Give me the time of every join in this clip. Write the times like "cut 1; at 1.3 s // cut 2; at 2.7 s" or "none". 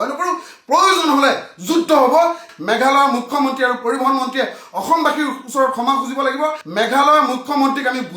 cut 1; at 2.5 s // cut 2; at 6.6 s